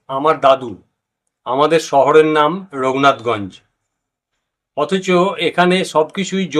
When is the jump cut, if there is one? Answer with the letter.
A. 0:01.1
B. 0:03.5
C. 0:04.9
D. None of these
D